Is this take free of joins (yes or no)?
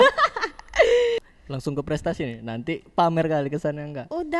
no